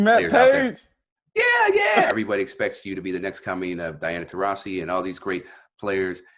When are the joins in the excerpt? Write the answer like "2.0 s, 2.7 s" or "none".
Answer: 2.1 s